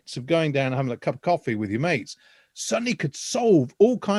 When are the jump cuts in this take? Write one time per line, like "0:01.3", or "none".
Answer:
none